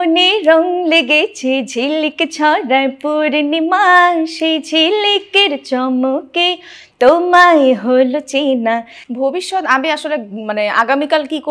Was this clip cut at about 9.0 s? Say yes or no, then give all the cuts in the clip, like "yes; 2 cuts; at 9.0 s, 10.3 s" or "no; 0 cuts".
yes; 1 cut; at 9.0 s